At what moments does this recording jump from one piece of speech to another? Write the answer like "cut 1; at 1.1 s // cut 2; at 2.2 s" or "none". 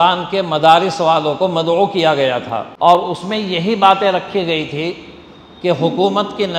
cut 1; at 2.7 s